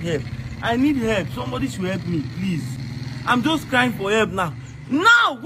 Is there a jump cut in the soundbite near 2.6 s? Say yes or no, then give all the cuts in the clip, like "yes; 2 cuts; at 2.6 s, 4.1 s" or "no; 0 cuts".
yes; 1 cut; at 2.6 s